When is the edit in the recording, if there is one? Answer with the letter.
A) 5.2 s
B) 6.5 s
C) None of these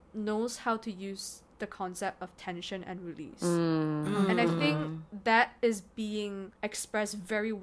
B